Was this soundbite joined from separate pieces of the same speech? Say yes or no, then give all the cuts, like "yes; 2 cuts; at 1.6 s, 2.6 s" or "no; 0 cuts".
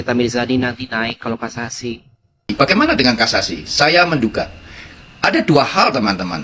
yes; 1 cut; at 2.5 s